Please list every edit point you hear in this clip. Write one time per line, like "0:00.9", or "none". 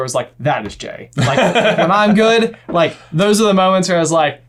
none